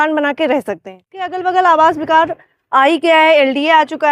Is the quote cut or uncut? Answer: cut